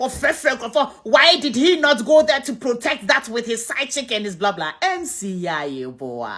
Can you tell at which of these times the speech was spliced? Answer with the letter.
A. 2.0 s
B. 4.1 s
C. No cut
C